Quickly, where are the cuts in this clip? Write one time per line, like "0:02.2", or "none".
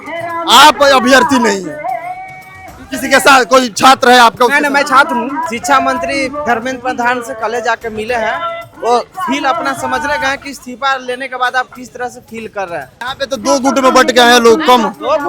0:05.5
0:13.0

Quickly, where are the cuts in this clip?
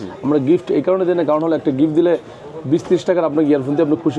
none

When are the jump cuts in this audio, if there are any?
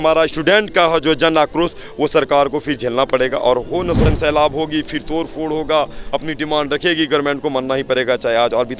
0:04.1

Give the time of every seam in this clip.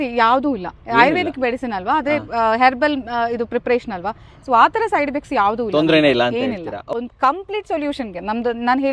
0:06.9

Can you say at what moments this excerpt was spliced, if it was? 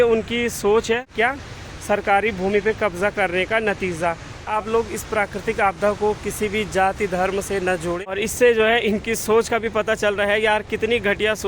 0:01.1
0:04.4
0:08.1

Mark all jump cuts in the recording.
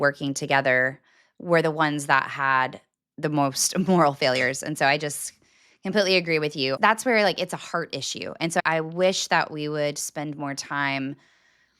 0:06.8
0:08.6

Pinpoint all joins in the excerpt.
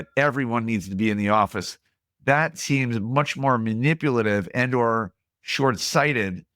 none

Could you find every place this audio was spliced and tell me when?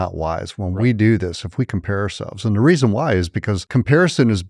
0:03.6

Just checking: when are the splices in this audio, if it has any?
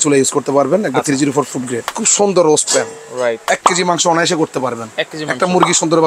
0:01.9
0:03.4

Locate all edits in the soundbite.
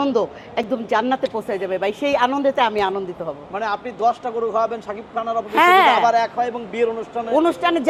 none

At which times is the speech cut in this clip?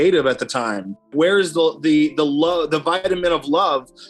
0:01.1

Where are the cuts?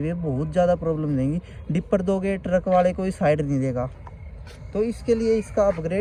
none

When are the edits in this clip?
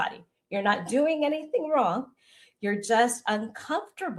none

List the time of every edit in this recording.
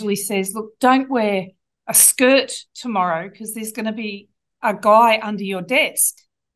none

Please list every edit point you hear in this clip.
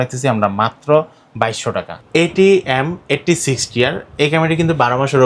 0:02.0

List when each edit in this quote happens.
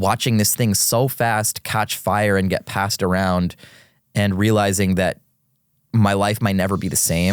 none

